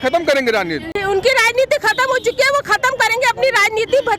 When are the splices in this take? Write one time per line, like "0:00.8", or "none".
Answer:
0:01.0